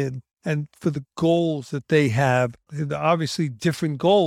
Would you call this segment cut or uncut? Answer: uncut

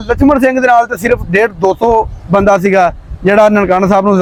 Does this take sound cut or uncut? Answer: uncut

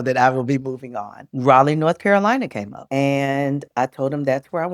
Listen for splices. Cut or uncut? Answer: uncut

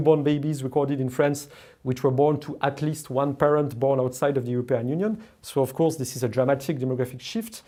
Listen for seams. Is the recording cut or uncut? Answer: uncut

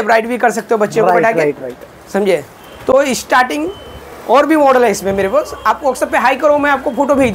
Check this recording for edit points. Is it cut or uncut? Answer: uncut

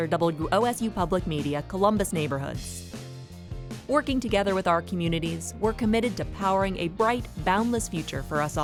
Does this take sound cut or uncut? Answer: uncut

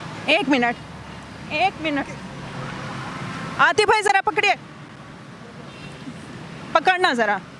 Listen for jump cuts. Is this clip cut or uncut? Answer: uncut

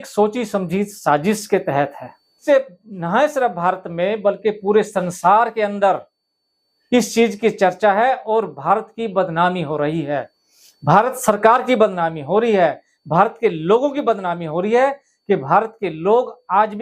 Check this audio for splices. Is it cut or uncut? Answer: cut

